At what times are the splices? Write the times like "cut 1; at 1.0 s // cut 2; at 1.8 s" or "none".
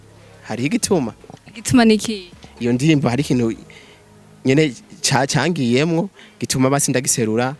none